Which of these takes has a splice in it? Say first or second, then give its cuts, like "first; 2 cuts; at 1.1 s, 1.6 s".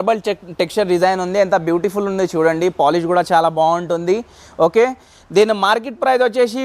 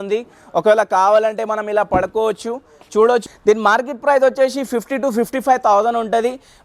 second; 1 cut; at 3.3 s